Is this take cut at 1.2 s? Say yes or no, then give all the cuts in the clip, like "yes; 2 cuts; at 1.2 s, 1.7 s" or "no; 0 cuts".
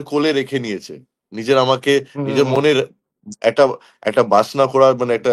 no; 0 cuts